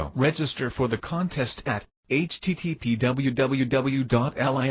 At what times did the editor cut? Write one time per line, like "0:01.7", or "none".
0:01.7